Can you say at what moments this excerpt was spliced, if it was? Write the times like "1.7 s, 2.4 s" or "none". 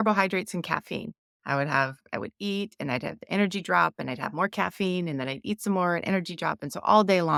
none